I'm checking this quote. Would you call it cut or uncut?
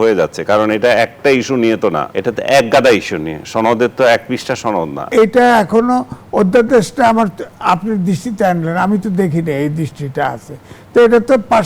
cut